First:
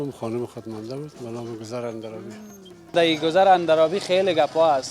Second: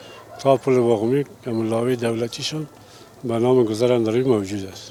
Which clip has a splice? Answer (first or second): first